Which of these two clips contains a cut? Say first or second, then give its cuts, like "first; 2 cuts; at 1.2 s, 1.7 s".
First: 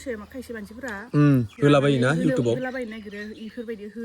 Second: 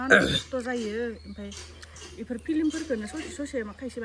first; 1 cut; at 1.5 s